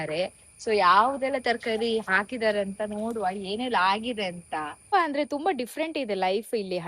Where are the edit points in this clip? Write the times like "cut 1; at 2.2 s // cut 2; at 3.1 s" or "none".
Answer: cut 1; at 4.9 s